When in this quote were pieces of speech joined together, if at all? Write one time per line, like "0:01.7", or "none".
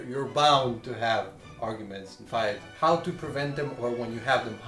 0:02.7